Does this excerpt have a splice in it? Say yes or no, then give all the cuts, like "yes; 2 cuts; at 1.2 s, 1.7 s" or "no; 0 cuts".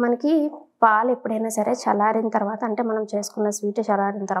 no; 0 cuts